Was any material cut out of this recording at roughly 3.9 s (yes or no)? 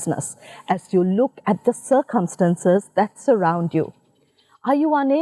no